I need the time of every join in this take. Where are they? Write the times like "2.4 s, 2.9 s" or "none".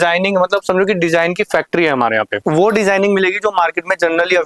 2.3 s